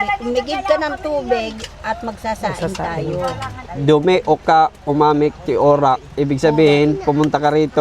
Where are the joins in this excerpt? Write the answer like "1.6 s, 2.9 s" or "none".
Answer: 3.6 s